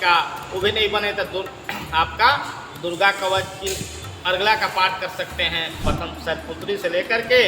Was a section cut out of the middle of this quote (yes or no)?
yes